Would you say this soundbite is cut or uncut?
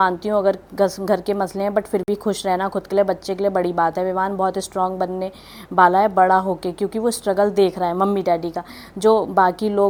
uncut